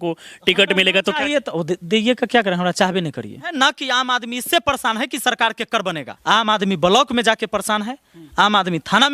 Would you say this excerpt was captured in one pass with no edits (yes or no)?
no